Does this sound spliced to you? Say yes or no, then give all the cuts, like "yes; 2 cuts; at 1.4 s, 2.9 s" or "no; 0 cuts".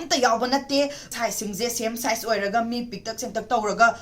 yes; 1 cut; at 1.1 s